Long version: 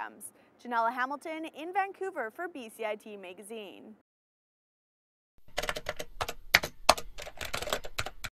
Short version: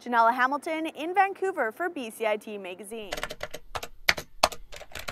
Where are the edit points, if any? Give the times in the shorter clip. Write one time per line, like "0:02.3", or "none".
0:03.1